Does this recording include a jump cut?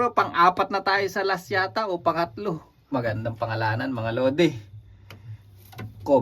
yes; 1 cut; at 2.9 s

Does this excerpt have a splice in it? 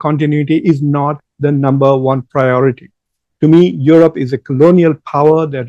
no; 0 cuts

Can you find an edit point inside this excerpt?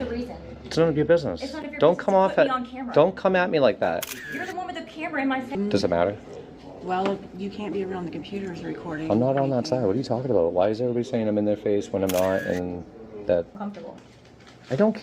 yes; 2 cuts; at 5.6 s, 13.6 s

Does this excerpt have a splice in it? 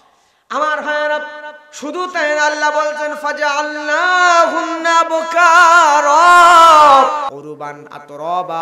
yes; 1 cut; at 7.3 s

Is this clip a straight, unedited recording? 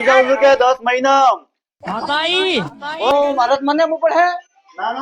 no; 1 cut; at 3.1 s

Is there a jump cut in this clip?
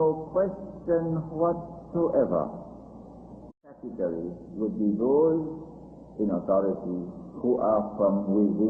no; 0 cuts

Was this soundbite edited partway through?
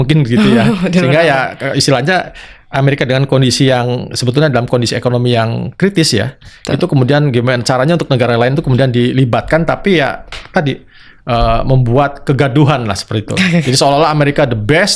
no; 0 cuts

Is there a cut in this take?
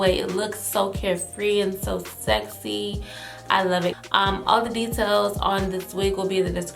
yes; 1 cut; at 3.9 s

